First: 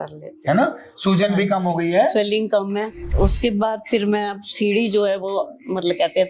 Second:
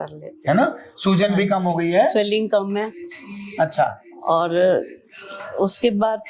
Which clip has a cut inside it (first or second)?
first